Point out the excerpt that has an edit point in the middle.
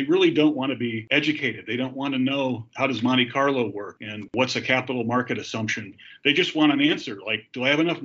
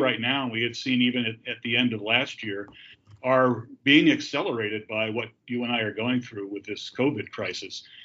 first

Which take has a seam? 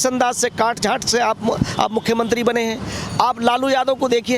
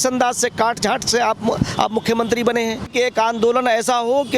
second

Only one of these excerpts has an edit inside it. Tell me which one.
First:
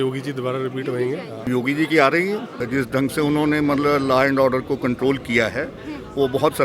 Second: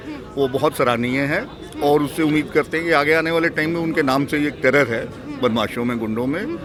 first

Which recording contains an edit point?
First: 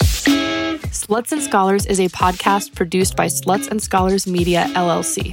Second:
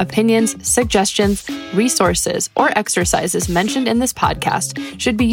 first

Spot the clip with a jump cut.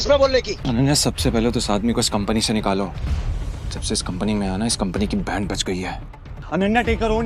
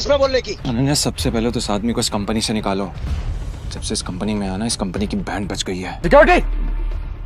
second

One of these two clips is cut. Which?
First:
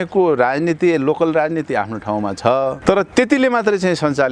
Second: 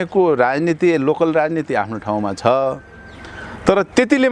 first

